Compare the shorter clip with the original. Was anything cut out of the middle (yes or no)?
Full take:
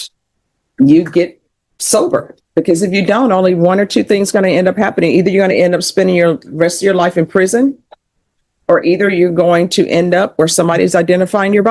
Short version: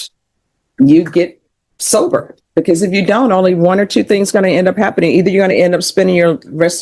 no